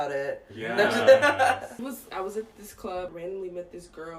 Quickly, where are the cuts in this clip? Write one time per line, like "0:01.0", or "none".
0:01.8